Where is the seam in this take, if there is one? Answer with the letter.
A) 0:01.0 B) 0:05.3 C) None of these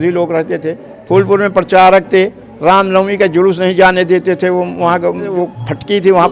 B